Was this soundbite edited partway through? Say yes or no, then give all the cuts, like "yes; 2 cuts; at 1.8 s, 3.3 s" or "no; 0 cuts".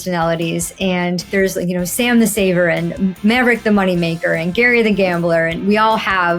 yes; 1 cut; at 1.3 s